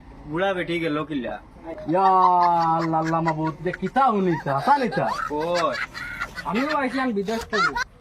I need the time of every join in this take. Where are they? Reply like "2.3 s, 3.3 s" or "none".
none